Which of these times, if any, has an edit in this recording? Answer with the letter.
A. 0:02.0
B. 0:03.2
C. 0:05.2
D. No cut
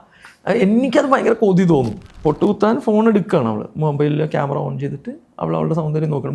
A